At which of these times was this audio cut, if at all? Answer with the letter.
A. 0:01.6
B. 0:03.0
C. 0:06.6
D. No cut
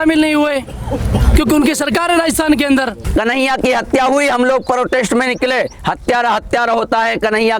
B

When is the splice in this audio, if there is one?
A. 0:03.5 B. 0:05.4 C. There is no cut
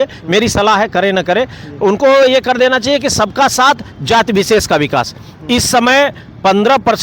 C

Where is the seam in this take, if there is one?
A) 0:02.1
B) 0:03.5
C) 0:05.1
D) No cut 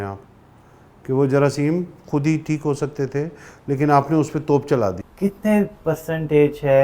C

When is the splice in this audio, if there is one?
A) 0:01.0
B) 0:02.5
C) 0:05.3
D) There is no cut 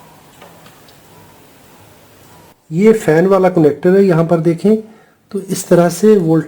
B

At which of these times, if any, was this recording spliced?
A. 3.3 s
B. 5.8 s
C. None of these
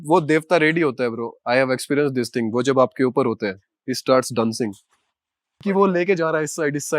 B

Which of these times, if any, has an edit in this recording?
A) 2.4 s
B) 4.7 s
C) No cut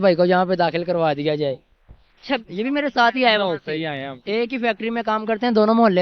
A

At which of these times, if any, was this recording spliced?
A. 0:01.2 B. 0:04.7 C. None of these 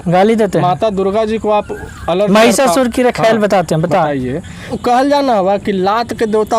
B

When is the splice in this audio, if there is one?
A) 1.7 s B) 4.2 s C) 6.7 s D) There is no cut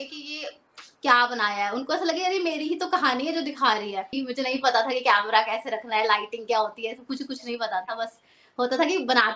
B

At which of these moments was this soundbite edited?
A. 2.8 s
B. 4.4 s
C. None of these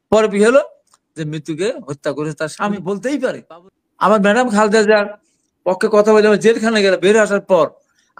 A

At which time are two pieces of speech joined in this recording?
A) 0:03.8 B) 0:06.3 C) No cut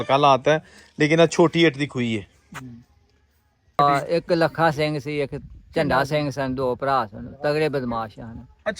A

